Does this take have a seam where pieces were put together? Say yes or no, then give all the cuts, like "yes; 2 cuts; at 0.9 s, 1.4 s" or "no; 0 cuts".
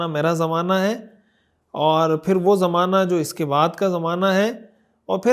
no; 0 cuts